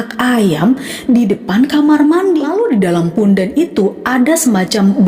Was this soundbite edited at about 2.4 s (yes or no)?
yes